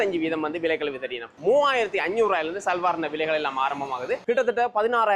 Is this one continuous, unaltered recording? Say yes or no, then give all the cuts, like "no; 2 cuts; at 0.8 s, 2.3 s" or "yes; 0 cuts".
no; 2 cuts; at 1.3 s, 4.2 s